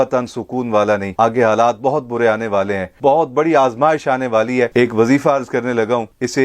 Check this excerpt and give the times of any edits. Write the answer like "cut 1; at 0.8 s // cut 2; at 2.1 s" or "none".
cut 1; at 2.9 s // cut 2; at 4.7 s